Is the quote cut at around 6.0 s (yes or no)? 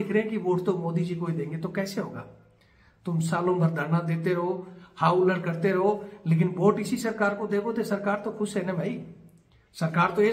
no